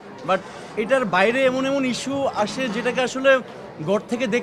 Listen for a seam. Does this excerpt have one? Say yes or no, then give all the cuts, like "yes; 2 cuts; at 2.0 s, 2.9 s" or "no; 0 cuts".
no; 0 cuts